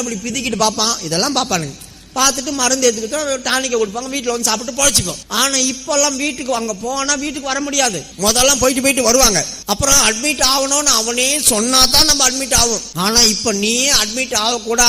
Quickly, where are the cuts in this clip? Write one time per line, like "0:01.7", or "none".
0:05.2
0:08.1
0:09.5
0:12.9